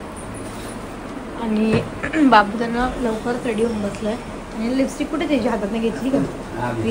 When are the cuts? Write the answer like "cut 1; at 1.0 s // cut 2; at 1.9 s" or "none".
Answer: none